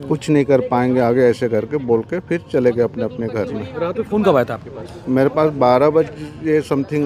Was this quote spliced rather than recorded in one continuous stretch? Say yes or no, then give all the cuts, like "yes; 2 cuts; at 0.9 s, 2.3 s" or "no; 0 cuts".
no; 0 cuts